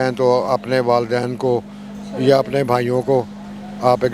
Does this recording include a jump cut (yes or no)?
no